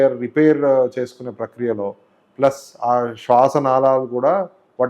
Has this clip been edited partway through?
no; 0 cuts

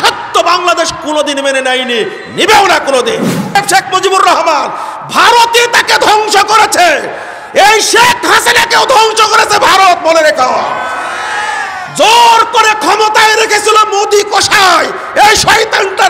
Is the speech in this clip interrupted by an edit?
yes; 1 cut; at 3.6 s

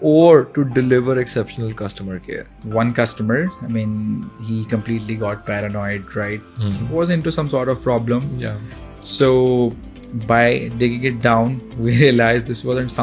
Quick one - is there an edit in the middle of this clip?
yes; 1 cut; at 2.6 s

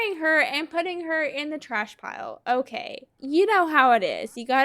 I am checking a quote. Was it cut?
yes; 1 cut; at 3.1 s

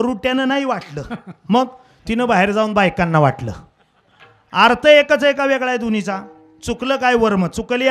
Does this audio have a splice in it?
no; 0 cuts

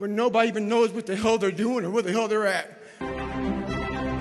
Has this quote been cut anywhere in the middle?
yes; 1 cut; at 3.0 s

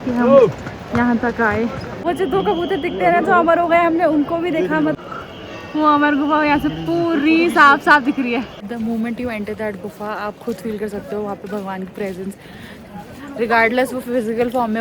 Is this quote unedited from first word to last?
no; 3 cuts; at 2.1 s, 4.9 s, 8.5 s

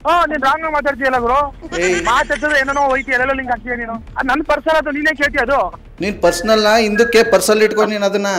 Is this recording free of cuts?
yes; 0 cuts

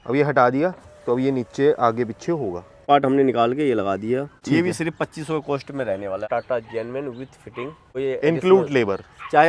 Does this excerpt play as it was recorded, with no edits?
no; 4 cuts; at 2.8 s, 4.3 s, 6.2 s, 7.9 s

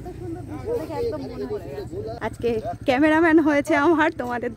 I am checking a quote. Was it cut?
yes; 1 cut; at 2.2 s

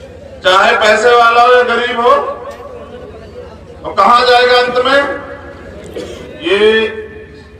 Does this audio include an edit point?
yes; 1 cut; at 6.3 s

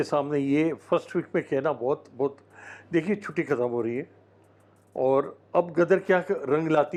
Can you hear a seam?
no; 0 cuts

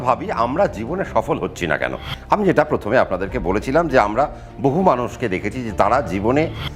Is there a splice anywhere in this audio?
no; 0 cuts

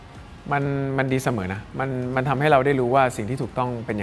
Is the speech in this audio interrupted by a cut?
no; 0 cuts

